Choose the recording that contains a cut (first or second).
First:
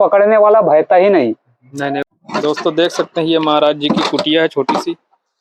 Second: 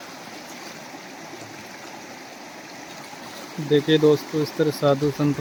first